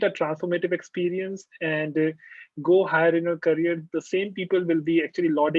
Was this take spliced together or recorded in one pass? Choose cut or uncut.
uncut